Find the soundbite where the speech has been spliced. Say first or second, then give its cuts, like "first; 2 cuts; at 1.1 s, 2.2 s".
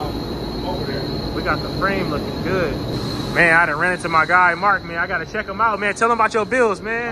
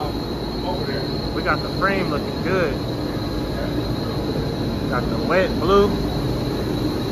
first; 1 cut; at 2.9 s